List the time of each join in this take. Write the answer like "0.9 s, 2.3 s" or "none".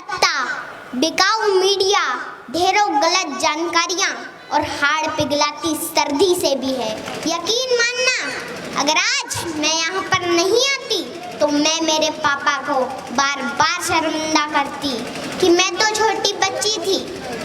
7.1 s